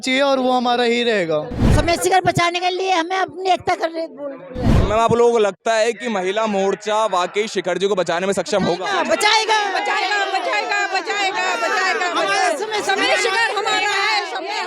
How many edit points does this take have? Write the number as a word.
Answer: two